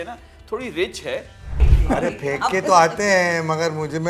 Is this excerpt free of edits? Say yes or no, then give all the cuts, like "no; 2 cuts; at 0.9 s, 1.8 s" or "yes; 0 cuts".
no; 1 cut; at 1.7 s